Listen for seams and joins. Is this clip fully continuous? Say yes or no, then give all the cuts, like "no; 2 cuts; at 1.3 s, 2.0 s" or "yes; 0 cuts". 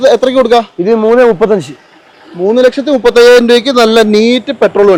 yes; 0 cuts